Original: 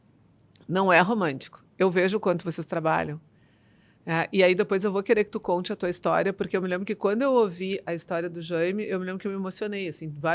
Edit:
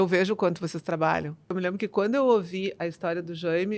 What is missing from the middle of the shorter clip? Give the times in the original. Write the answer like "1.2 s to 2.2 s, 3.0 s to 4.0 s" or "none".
3.4 s to 6.6 s